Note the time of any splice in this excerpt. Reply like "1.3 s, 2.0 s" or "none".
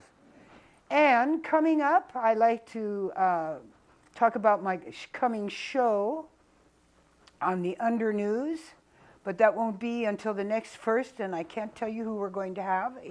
6.9 s